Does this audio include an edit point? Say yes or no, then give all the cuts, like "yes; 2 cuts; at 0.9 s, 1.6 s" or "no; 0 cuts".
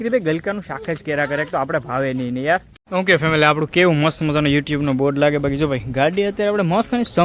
yes; 1 cut; at 2.7 s